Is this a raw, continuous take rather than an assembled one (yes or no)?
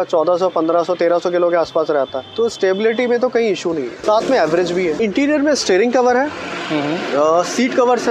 no